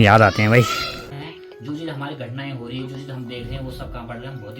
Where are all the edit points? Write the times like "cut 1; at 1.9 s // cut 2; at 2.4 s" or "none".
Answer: cut 1; at 1.1 s